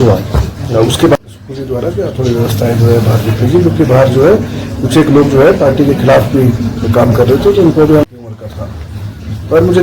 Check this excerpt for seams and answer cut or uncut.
cut